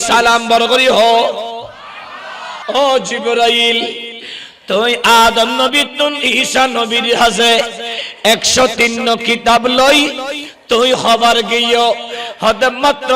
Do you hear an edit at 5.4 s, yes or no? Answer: no